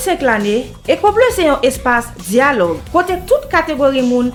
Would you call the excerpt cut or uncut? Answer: uncut